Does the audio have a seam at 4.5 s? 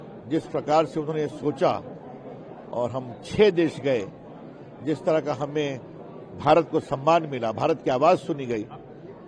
no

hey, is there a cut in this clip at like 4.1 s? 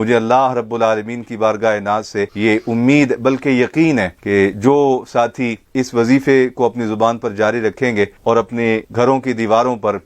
no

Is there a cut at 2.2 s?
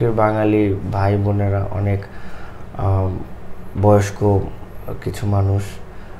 no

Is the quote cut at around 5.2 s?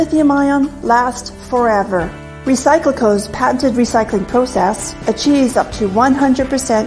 no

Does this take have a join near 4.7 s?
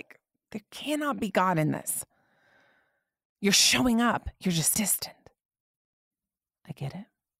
yes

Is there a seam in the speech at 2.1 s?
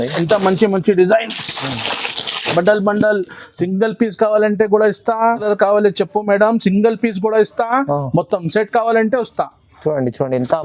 no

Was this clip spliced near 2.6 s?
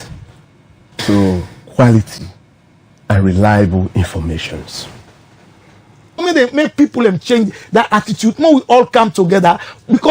no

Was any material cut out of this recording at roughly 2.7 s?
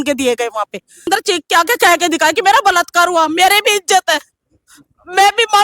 no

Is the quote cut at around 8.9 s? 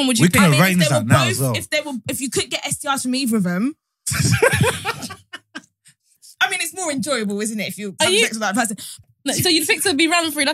yes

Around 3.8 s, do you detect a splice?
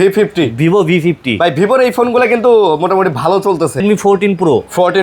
yes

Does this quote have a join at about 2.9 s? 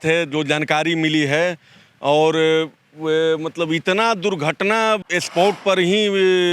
no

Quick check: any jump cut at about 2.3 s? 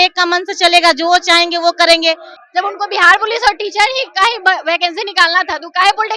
yes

